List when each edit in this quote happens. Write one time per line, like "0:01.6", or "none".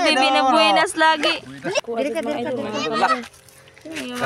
0:01.8